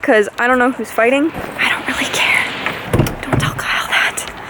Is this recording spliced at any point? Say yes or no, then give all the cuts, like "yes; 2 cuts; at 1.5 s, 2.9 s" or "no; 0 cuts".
yes; 1 cut; at 2.8 s